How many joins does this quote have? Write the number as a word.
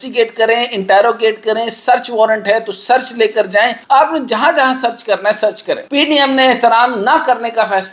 two